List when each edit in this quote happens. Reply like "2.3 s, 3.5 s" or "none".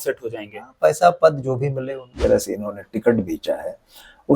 2.1 s